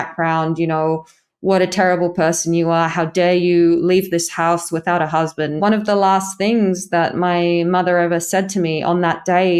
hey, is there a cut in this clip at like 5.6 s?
yes; 1 cut; at 5.6 s

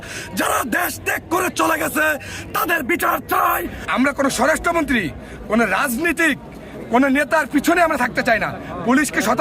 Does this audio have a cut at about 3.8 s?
yes; 1 cut; at 3.8 s

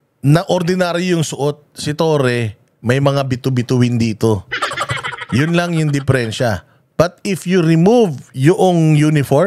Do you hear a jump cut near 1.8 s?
no; 0 cuts

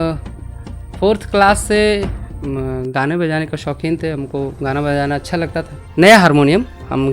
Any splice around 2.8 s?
no; 1 cut; at 5.8 s

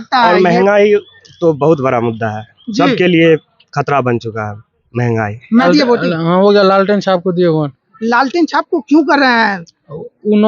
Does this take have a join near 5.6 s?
yes; 1 cut; at 5.6 s

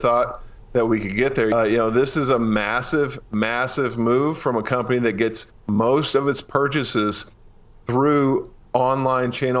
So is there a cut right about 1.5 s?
yes; 1 cut; at 1.5 s

